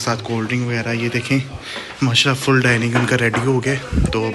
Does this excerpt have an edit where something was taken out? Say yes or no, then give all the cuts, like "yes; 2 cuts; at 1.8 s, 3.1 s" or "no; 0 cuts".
no; 0 cuts